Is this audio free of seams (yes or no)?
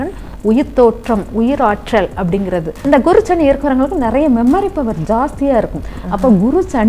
no